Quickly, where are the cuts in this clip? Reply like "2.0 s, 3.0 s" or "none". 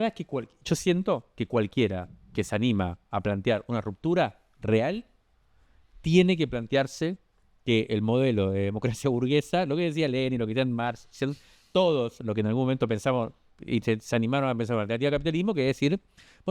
none